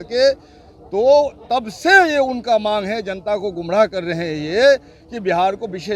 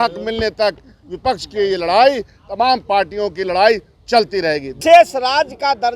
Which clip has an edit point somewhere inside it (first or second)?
second